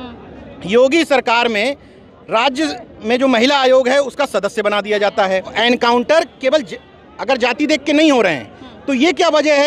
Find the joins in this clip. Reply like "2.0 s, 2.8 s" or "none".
5.5 s